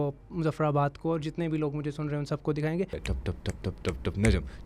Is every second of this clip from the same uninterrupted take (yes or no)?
no